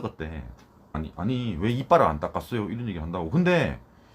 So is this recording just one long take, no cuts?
no; 1 cut; at 0.9 s

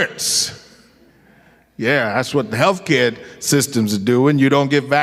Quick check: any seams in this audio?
no; 0 cuts

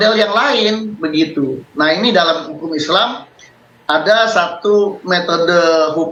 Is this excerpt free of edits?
yes; 0 cuts

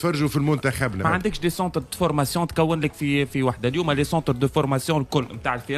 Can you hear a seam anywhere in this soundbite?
yes; 1 cut; at 1.0 s

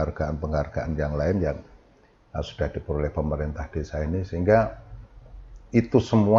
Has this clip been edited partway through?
no; 0 cuts

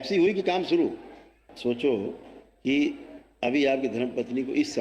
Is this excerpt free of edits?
no; 1 cut; at 1.4 s

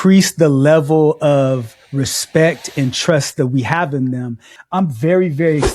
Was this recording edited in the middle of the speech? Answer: yes; 1 cut; at 4.5 s

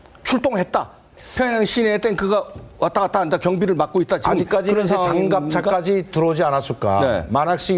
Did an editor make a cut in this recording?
no; 0 cuts

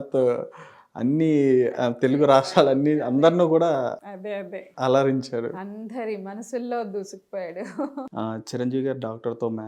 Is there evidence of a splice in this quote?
yes; 1 cut; at 8.1 s

